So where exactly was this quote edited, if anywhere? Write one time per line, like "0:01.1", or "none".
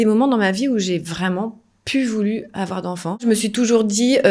0:03.2